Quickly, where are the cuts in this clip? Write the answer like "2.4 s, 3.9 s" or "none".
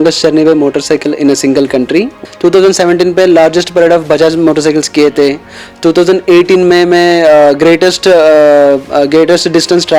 2.2 s